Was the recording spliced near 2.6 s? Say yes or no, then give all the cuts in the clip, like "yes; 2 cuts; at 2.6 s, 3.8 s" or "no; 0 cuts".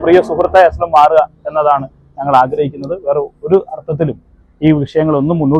no; 0 cuts